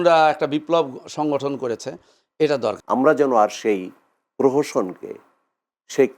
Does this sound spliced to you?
yes; 1 cut; at 2.8 s

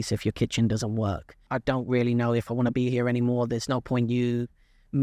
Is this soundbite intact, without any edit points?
no; 1 cut; at 1.5 s

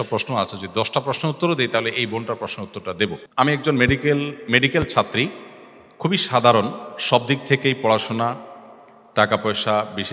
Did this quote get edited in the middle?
yes; 1 cut; at 3.3 s

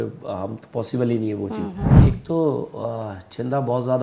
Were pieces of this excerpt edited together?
yes; 1 cut; at 1.9 s

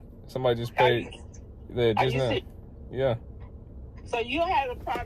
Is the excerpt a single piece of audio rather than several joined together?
yes; 0 cuts

